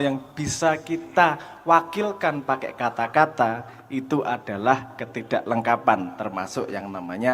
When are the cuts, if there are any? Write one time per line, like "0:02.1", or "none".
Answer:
none